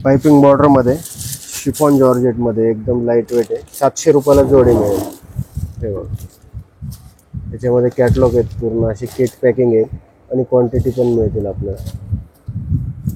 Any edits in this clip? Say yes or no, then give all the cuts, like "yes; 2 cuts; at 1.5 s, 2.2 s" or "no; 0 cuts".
no; 0 cuts